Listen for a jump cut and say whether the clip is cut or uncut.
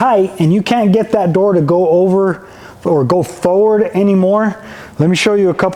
uncut